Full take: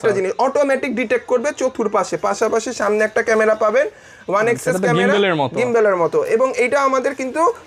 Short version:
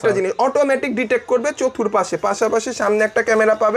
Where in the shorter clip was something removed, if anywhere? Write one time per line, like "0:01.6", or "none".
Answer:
none